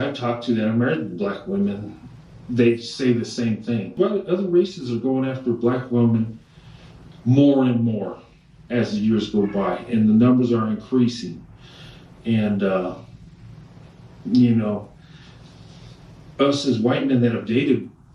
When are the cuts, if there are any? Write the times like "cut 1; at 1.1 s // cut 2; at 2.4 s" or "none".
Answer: cut 1; at 4.0 s